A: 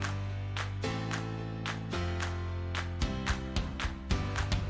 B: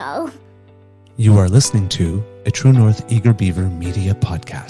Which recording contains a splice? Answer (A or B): B